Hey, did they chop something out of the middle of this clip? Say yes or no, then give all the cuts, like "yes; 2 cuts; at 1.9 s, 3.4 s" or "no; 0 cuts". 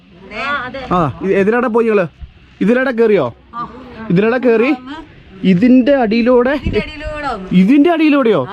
no; 0 cuts